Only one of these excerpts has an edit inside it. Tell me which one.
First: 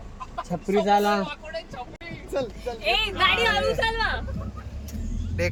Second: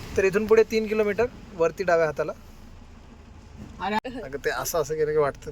second; 1 cut; at 4.0 s

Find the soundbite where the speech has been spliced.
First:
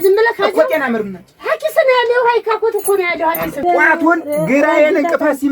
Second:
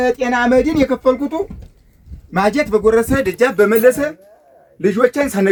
first; 1 cut; at 3.9 s

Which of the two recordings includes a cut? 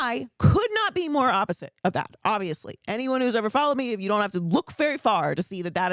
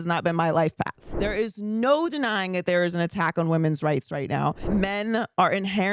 second; 2 cuts; at 1.1 s, 4.7 s

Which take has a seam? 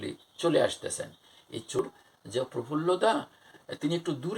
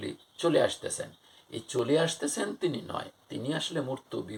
first; 1 cut; at 1.8 s

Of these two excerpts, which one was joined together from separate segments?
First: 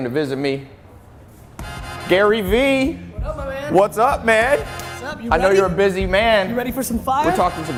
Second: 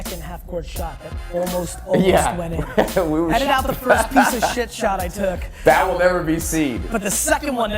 second; 1 cut; at 1.3 s

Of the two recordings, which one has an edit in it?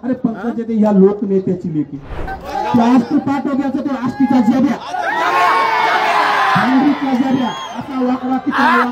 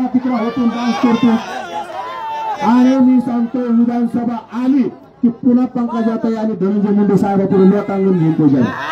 first; 1 cut; at 2.3 s

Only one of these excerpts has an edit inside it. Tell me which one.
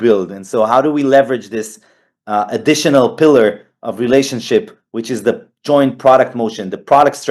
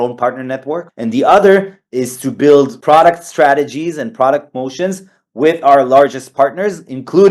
second; 2 cuts; at 0.9 s, 2.8 s

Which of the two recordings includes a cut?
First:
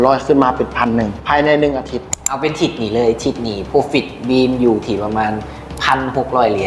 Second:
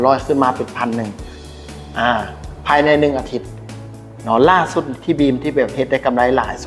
first; 2 cuts; at 1.2 s, 2.3 s

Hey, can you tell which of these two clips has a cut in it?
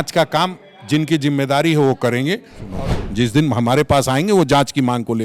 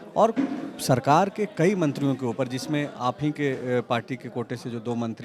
first; 1 cut; at 2.7 s

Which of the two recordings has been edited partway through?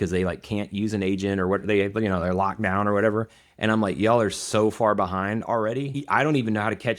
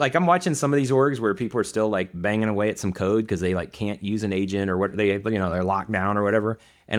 first; 1 cut; at 6.0 s

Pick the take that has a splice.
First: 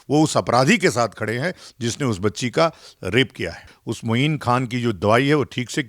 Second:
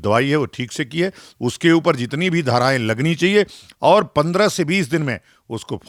first; 1 cut; at 3.7 s

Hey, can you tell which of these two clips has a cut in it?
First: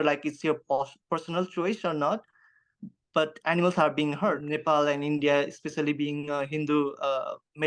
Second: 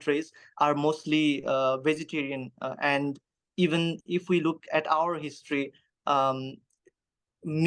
first; 1 cut; at 4.5 s

